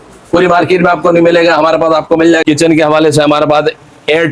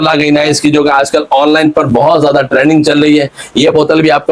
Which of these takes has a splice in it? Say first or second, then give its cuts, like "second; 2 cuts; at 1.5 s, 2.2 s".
first; 1 cut; at 2.4 s